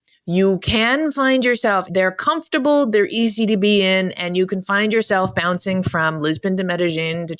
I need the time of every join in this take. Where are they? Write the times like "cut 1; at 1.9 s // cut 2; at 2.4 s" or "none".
cut 1; at 1.9 s